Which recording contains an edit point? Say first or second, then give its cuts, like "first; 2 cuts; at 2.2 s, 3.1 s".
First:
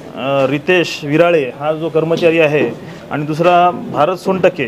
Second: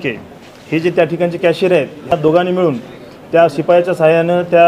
second; 1 cut; at 2.1 s